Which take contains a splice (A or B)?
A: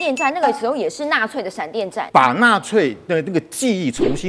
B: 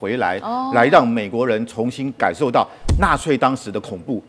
A